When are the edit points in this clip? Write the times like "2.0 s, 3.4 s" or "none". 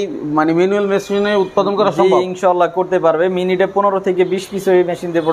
none